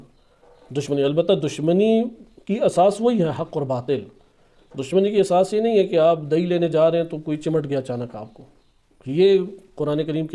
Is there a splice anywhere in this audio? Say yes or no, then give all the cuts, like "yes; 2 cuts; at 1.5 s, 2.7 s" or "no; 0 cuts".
no; 0 cuts